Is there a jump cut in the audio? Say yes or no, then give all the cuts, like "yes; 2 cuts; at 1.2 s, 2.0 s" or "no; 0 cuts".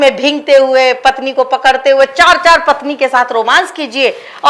no; 0 cuts